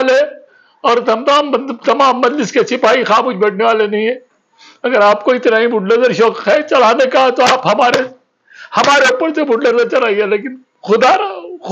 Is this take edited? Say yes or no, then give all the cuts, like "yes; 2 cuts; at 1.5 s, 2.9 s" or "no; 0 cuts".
no; 0 cuts